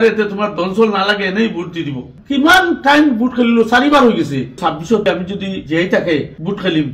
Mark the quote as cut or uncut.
cut